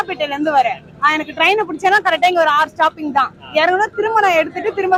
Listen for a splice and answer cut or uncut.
uncut